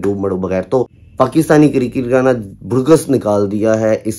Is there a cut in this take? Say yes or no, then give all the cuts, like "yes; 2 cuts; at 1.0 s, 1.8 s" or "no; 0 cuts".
yes; 1 cut; at 1.0 s